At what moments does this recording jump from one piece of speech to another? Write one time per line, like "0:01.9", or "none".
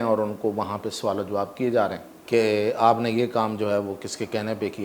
0:02.1